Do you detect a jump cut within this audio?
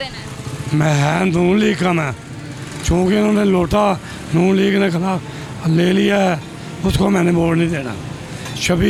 no; 0 cuts

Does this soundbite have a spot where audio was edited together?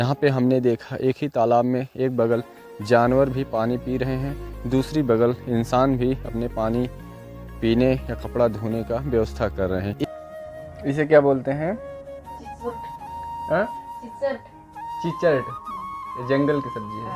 yes; 1 cut; at 10.0 s

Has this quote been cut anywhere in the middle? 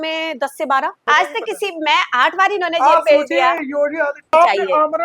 yes; 2 cuts; at 1.0 s, 4.3 s

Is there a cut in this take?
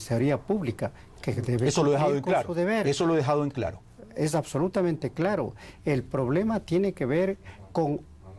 yes; 1 cut; at 5.3 s

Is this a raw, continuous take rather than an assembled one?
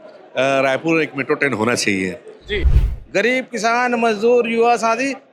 no; 1 cut; at 2.8 s

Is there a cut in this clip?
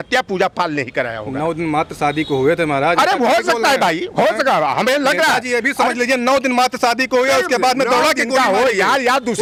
no; 0 cuts

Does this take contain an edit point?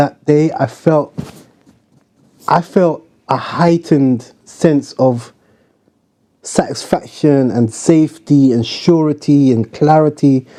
no; 0 cuts

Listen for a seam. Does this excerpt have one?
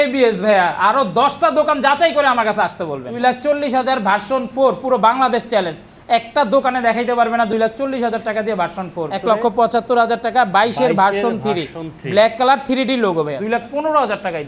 yes; 3 cuts; at 3.1 s, 9.1 s, 13.6 s

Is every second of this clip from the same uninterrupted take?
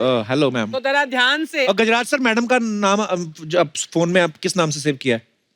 no; 1 cut; at 1.7 s

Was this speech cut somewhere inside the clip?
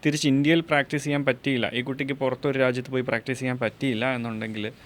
no; 0 cuts

